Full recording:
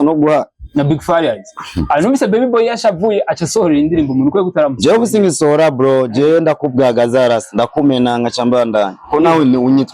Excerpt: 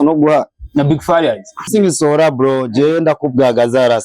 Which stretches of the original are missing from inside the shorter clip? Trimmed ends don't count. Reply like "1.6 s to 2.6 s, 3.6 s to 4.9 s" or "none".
1.7 s to 5.1 s